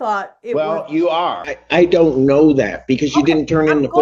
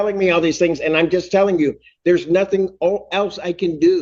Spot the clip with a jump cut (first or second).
first